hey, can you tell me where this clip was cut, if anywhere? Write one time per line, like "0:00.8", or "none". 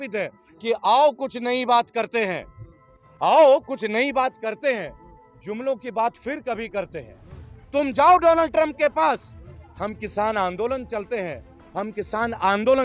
none